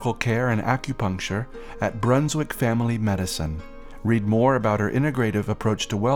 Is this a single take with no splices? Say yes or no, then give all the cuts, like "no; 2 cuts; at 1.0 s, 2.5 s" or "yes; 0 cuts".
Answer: yes; 0 cuts